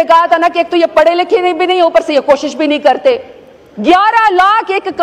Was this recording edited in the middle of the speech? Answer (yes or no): no